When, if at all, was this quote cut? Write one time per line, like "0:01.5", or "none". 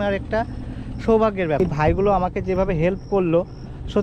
0:01.6